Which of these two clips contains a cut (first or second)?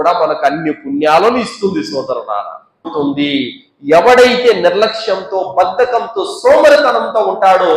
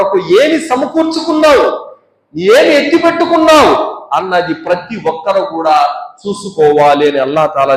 first